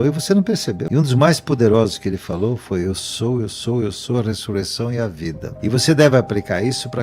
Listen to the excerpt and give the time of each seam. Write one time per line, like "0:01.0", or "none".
0:01.1
0:05.5

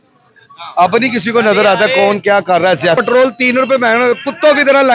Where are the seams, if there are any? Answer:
0:03.0

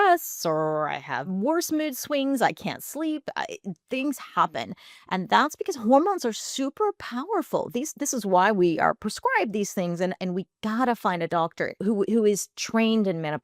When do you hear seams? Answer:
0:01.3
0:10.2
0:11.8

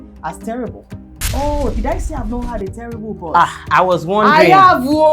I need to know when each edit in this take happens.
0:01.2

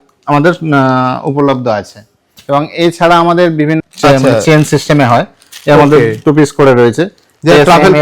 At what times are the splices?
0:03.8

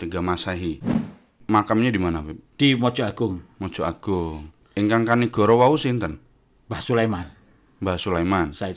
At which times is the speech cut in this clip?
0:01.2
0:04.5

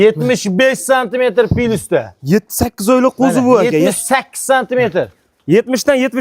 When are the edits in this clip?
none

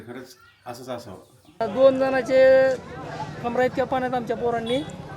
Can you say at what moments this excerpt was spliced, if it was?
0:01.6

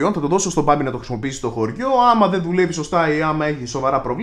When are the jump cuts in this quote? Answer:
none

